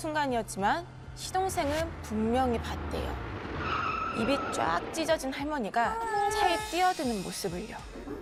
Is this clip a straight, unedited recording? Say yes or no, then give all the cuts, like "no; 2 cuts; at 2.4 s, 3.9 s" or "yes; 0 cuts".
yes; 0 cuts